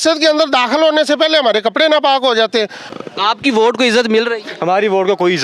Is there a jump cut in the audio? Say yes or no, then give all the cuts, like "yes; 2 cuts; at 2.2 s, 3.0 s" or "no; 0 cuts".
yes; 1 cut; at 2.8 s